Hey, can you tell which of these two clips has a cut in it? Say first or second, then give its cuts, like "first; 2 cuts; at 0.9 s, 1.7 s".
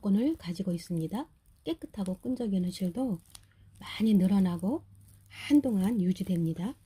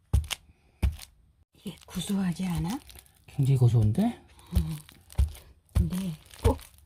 second; 1 cut; at 1.4 s